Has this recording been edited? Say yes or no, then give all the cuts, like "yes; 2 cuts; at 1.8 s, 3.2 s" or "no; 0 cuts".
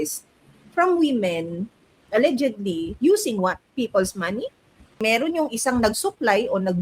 yes; 1 cut; at 5.0 s